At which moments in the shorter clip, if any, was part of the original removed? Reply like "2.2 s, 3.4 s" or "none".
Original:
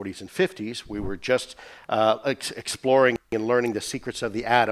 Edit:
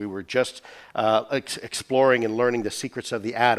2.2 s